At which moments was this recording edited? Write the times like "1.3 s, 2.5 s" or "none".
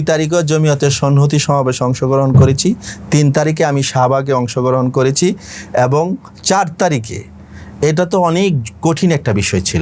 none